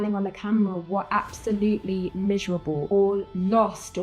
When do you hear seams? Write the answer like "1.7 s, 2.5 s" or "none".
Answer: 2.8 s